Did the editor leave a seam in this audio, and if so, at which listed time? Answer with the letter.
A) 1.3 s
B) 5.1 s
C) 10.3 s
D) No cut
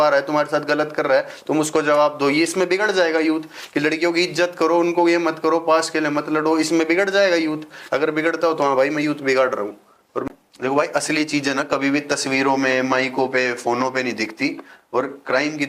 C